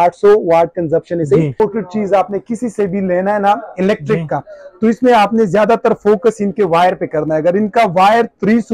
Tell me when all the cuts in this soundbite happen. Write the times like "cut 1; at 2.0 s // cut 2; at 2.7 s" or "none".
cut 1; at 1.6 s